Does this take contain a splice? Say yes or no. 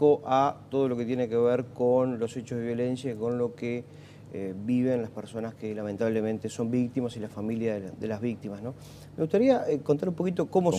yes